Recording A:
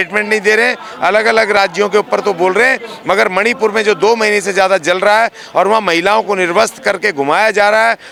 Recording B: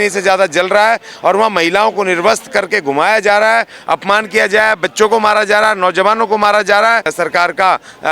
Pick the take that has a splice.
B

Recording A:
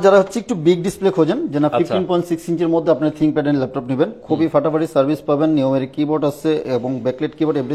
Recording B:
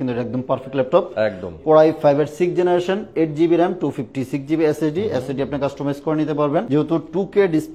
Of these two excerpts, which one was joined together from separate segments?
B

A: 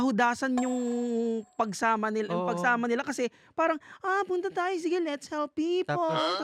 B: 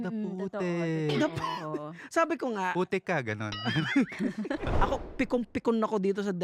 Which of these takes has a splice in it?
B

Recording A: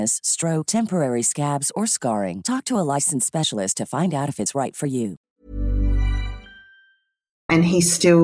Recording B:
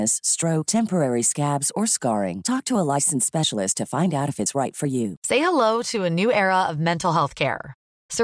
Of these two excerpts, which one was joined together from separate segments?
B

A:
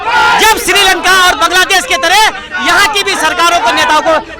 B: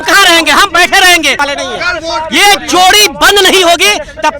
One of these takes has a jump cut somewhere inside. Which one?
B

